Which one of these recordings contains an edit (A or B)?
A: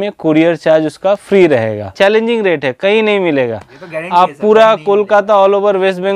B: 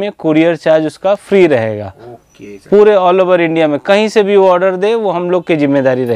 A